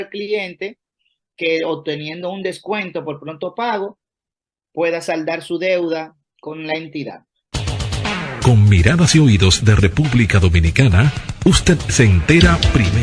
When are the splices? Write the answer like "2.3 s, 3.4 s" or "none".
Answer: 7.5 s